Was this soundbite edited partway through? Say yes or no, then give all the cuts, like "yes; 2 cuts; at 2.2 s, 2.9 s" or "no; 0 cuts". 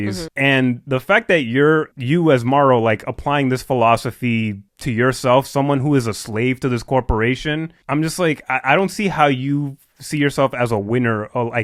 no; 0 cuts